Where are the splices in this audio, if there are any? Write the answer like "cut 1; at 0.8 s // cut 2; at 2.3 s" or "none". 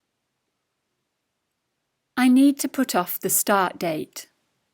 cut 1; at 1.7 s